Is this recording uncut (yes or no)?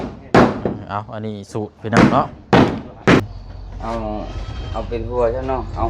no